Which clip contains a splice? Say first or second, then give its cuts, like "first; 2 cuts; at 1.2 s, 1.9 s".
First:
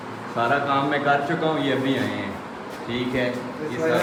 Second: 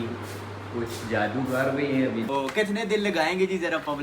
second; 1 cut; at 2.3 s